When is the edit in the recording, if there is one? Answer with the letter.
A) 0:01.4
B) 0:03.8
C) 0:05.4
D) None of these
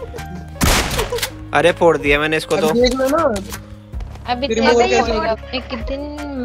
C